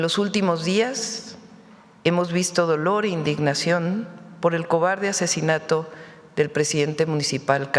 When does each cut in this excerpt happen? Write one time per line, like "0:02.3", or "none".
none